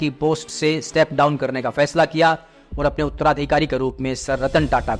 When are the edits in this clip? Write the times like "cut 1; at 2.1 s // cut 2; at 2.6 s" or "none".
none

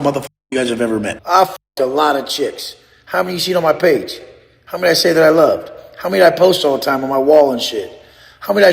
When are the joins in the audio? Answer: cut 1; at 1.2 s

